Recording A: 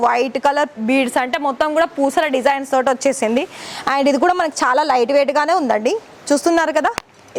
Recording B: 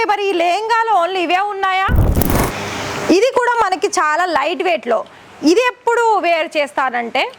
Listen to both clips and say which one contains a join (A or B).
B